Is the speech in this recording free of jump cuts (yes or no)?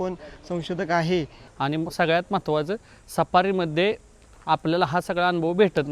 no